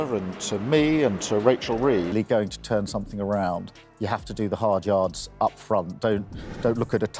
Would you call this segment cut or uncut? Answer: cut